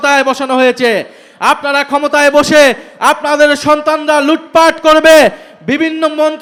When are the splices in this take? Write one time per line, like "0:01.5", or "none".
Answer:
none